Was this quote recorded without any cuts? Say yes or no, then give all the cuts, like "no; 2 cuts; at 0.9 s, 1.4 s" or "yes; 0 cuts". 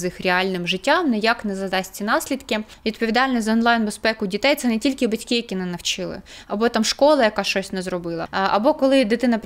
no; 2 cuts; at 2.7 s, 8.2 s